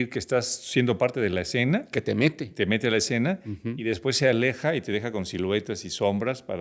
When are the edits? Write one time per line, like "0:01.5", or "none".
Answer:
none